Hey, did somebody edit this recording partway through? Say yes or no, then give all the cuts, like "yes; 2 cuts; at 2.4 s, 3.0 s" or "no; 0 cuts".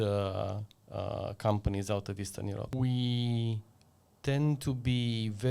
yes; 1 cut; at 2.7 s